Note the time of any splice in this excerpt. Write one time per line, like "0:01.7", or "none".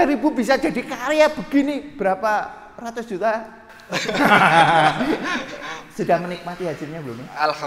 none

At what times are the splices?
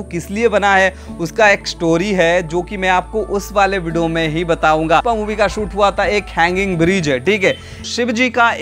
0:05.0
0:07.7

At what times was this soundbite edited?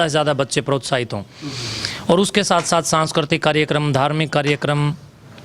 none

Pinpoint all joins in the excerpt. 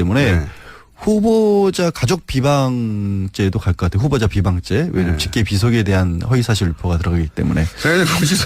0:02.0

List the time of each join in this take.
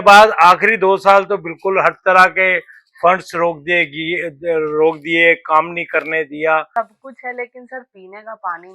0:06.7

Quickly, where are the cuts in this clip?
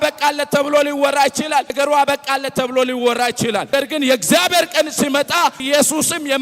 0:01.7
0:03.7
0:05.6

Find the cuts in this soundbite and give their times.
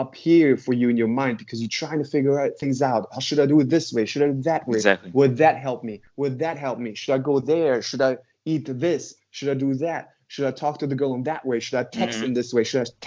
none

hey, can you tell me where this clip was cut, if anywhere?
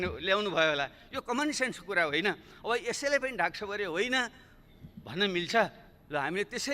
none

